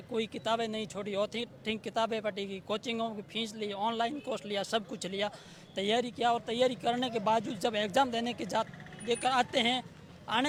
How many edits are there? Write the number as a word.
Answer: zero